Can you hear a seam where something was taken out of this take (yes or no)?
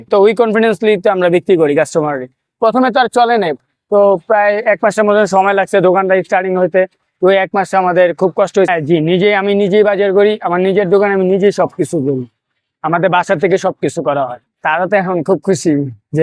yes